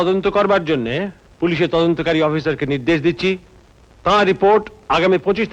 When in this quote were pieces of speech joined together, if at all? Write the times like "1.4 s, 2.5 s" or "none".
1.2 s